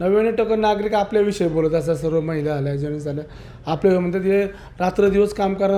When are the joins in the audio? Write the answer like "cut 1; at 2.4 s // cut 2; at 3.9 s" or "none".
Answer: none